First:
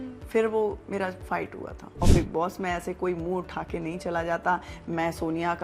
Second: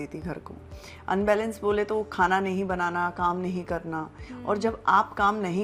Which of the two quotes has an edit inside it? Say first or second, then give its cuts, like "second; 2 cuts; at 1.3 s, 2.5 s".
first; 1 cut; at 1.9 s